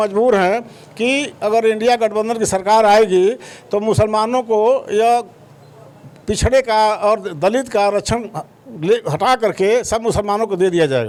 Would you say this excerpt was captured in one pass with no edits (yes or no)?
yes